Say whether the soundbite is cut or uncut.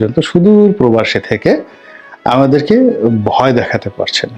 uncut